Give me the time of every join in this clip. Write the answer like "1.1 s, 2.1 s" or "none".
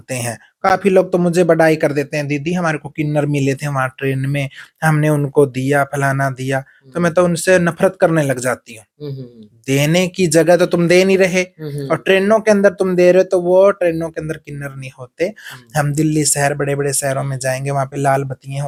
none